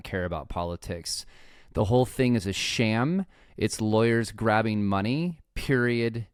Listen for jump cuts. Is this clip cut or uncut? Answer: uncut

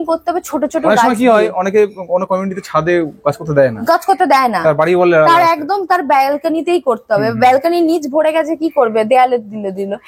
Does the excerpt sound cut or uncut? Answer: uncut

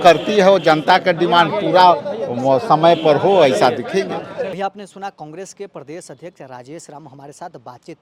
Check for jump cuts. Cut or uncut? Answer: uncut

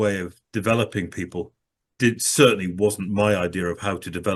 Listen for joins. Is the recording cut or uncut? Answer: uncut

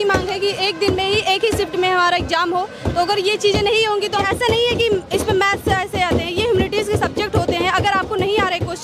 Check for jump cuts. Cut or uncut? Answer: cut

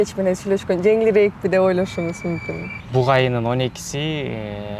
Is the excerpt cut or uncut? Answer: cut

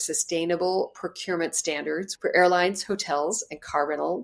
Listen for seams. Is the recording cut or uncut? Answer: cut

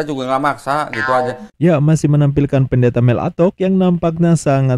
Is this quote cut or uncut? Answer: uncut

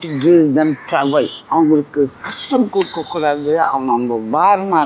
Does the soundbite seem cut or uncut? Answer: cut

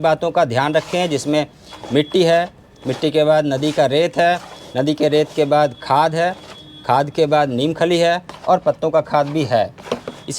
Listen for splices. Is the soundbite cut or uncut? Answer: uncut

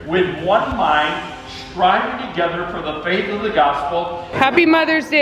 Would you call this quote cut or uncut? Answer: cut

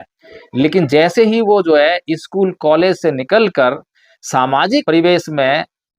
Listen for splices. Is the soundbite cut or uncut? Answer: cut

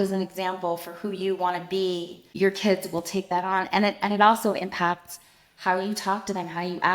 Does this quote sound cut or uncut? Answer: cut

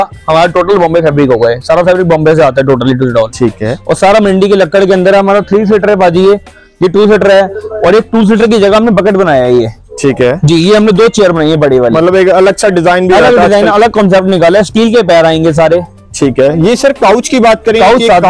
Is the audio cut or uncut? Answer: uncut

